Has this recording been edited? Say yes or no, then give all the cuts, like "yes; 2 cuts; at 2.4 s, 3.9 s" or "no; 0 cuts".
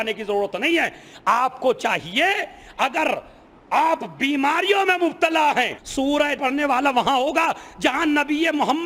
yes; 1 cut; at 6.3 s